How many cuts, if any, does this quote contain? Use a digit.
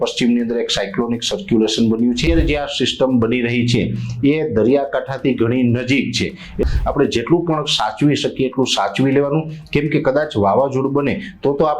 2